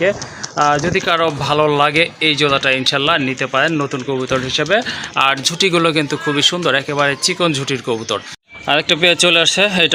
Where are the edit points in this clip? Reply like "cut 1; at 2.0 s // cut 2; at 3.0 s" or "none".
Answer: cut 1; at 8.4 s

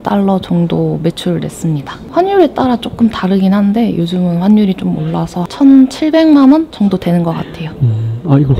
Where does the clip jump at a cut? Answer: none

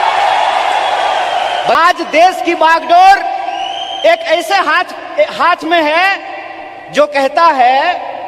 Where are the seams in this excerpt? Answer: cut 1; at 1.8 s

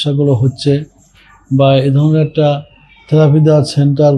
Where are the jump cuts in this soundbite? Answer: none

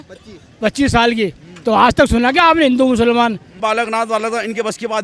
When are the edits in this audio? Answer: cut 1; at 3.6 s

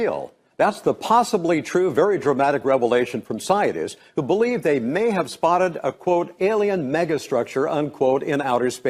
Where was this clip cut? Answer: cut 1; at 1.6 s

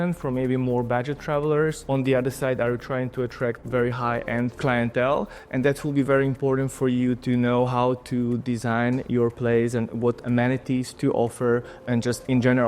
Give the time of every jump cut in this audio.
cut 1; at 10.9 s

